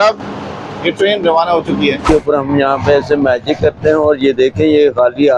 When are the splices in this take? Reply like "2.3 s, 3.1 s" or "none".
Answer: 2.0 s